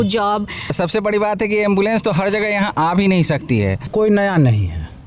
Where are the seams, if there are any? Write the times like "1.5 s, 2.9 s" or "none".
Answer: 0.7 s, 3.9 s